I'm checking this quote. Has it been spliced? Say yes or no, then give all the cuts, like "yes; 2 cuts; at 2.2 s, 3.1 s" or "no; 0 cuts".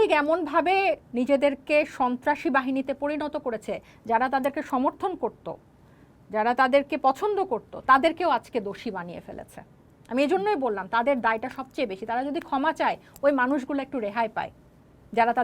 no; 0 cuts